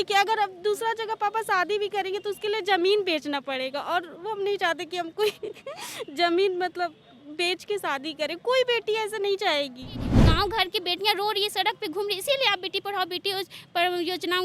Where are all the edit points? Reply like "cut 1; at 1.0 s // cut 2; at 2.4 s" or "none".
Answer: cut 1; at 10.1 s